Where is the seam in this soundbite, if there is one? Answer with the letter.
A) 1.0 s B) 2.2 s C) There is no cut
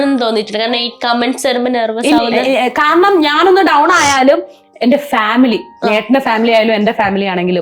B